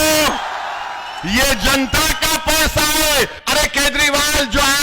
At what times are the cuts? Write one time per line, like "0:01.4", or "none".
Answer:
0:03.4